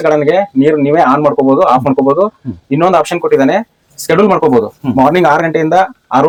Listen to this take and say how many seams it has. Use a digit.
0